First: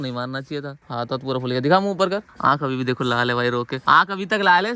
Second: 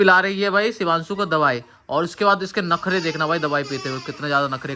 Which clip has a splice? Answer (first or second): first